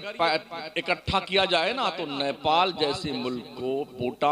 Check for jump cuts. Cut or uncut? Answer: uncut